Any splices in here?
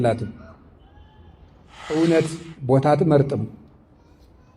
yes; 1 cut; at 1.9 s

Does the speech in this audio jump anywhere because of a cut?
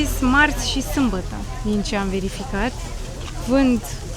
no; 0 cuts

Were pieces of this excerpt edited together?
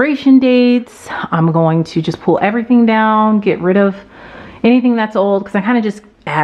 no; 0 cuts

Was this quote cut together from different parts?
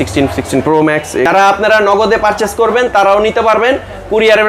yes; 1 cut; at 1.3 s

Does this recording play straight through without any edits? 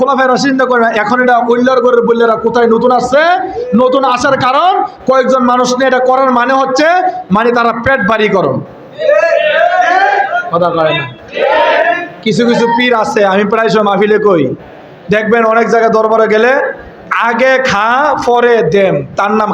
yes; 0 cuts

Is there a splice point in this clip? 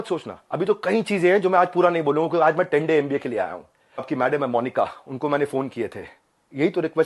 yes; 1 cut; at 4.0 s

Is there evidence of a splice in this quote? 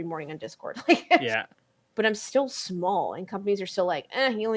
yes; 1 cut; at 1.5 s

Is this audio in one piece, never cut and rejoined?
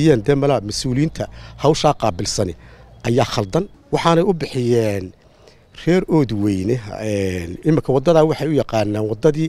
no; 1 cut; at 3.8 s

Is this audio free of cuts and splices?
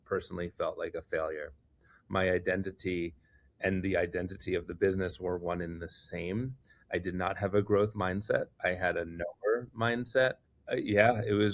no; 1 cut; at 10.5 s

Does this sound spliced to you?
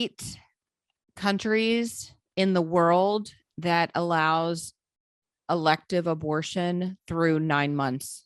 no; 0 cuts

